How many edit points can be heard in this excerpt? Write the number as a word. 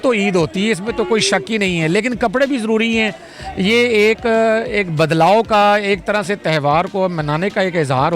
zero